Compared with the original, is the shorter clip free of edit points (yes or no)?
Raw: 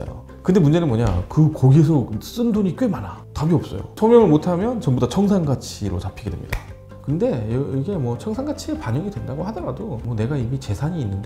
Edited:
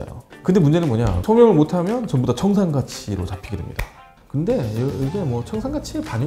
no